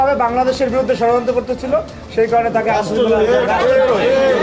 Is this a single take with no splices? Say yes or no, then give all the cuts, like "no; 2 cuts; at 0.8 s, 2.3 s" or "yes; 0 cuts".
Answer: yes; 0 cuts